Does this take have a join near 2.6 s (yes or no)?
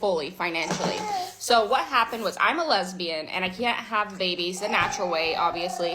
yes